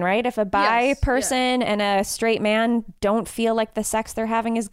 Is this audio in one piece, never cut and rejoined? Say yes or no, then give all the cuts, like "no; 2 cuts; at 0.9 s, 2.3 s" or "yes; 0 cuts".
yes; 0 cuts